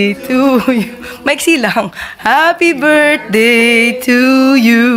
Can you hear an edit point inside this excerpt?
no; 0 cuts

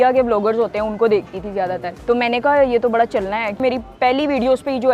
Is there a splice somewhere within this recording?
yes; 2 cuts; at 1.9 s, 3.6 s

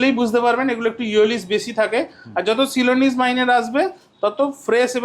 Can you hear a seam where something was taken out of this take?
no; 0 cuts

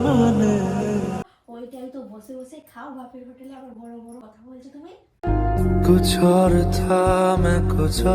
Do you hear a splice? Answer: yes; 2 cuts; at 1.3 s, 4.2 s

